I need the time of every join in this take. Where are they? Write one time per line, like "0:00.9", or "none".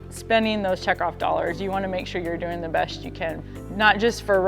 0:03.4